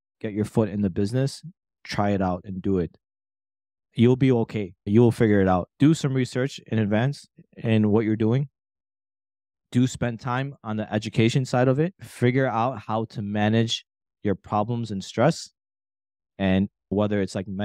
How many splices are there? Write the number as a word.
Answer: two